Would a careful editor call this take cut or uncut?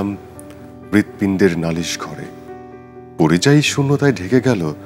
uncut